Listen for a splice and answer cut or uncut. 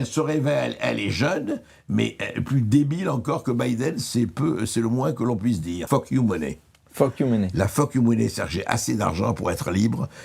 cut